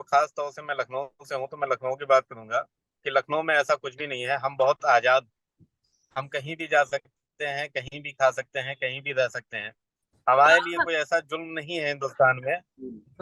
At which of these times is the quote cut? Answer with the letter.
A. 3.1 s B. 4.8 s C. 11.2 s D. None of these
D